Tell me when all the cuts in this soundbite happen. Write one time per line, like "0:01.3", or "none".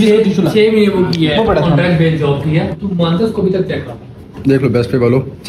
0:02.8
0:04.3